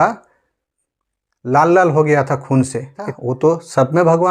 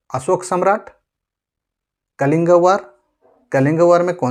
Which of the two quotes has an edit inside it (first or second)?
first